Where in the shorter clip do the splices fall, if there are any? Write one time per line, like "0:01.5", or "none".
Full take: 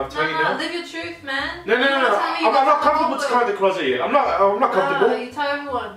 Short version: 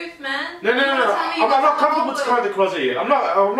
none